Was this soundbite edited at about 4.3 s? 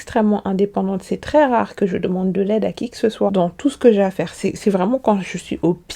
no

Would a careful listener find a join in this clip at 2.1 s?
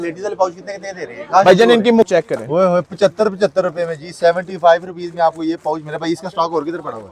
yes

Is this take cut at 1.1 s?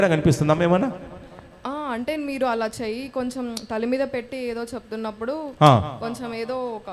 no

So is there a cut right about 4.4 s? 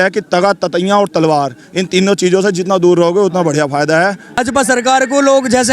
yes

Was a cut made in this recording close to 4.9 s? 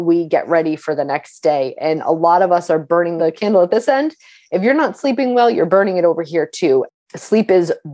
no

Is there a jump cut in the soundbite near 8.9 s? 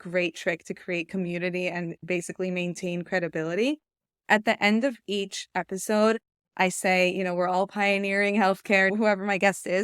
yes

